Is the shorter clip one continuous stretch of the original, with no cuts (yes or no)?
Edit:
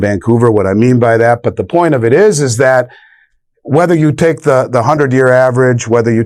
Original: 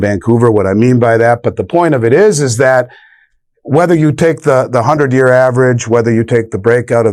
yes